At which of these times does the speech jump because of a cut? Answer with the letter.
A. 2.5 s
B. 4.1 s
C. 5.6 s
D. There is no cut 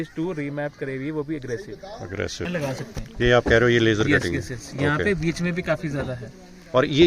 A